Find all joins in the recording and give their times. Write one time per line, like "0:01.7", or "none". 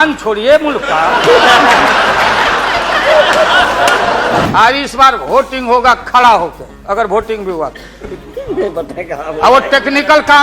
0:04.5